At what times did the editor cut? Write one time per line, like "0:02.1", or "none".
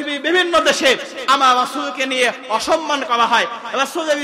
none